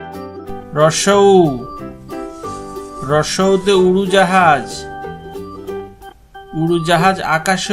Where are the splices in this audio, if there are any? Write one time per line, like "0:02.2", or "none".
0:00.7
0:01.6
0:03.0